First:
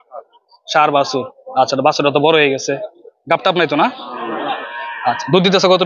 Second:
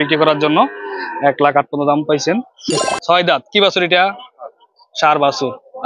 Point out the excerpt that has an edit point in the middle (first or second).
second